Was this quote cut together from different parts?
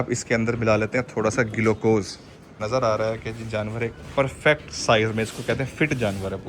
yes; 1 cut; at 2.6 s

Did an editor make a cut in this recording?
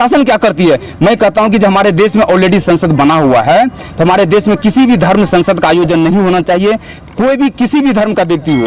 no; 0 cuts

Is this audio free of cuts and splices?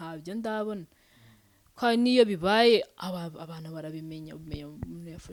yes; 0 cuts

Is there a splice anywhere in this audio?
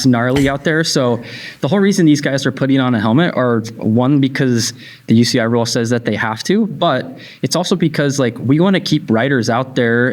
no; 0 cuts

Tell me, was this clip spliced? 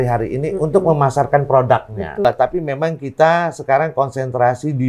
yes; 1 cut; at 2.2 s

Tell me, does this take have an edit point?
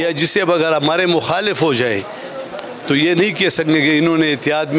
no; 0 cuts

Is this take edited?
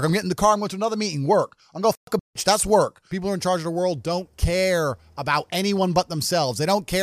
yes; 1 cut; at 3.0 s

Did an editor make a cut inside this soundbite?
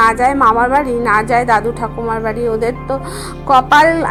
no; 0 cuts

